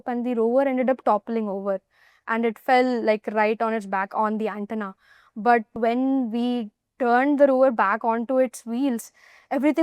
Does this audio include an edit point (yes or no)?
yes